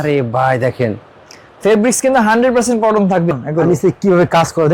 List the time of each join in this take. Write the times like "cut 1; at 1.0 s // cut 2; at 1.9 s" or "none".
cut 1; at 3.3 s